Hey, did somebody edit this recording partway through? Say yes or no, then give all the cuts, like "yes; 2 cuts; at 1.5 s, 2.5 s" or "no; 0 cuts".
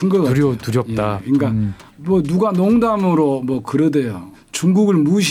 no; 0 cuts